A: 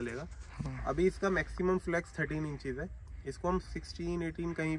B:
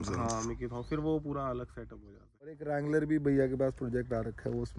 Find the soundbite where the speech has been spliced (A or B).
B